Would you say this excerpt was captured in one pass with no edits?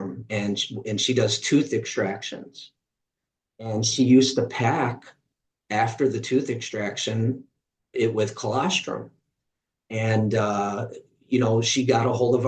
yes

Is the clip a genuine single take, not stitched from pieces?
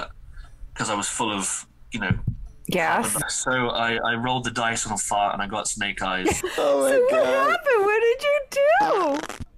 no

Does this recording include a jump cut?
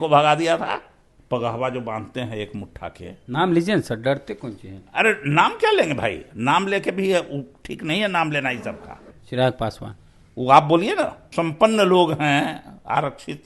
yes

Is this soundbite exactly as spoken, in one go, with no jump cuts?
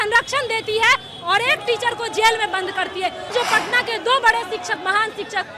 no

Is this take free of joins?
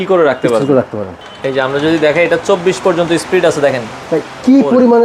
no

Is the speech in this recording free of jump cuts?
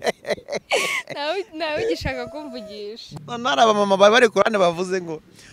no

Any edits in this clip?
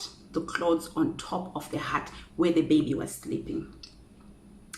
no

